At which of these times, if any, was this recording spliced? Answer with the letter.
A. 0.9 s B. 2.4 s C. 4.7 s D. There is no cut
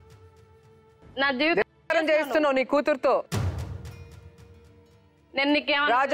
A